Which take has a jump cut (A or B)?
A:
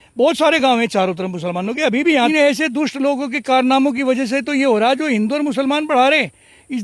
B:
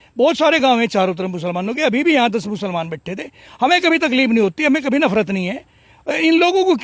A